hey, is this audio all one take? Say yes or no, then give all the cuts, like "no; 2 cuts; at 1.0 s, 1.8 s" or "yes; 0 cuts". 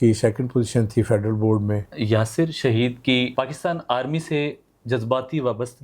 no; 2 cuts; at 1.9 s, 3.3 s